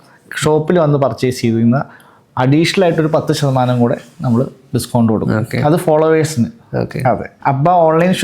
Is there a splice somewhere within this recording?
yes; 1 cut; at 7.3 s

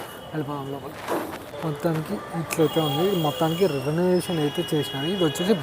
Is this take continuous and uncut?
no; 1 cut; at 1.5 s

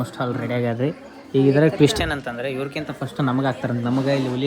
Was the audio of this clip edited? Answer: no; 0 cuts

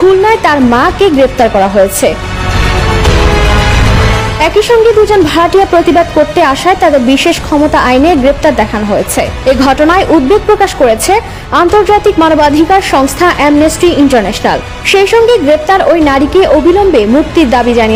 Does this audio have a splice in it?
no; 0 cuts

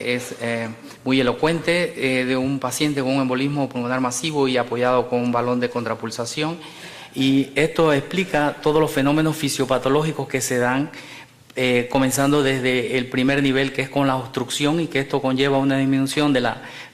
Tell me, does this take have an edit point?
yes; 1 cut; at 14.2 s

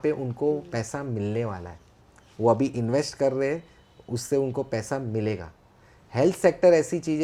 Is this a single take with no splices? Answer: yes; 0 cuts

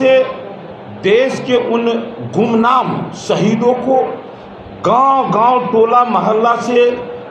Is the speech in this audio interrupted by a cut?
no; 0 cuts

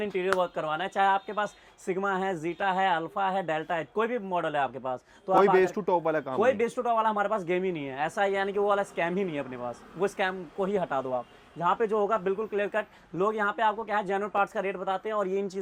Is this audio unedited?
yes; 0 cuts

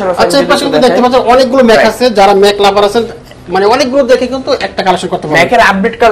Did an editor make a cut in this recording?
no; 0 cuts

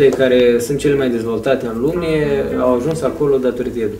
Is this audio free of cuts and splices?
yes; 0 cuts

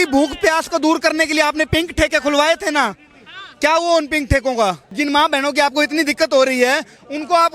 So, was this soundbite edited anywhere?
yes; 1 cut; at 4.9 s

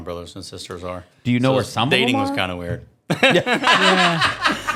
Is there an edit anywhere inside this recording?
no; 0 cuts

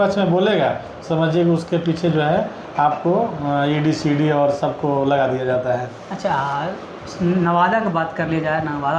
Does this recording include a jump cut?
no; 0 cuts

